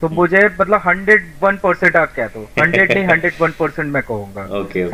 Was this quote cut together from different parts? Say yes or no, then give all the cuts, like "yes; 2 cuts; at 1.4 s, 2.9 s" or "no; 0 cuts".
no; 0 cuts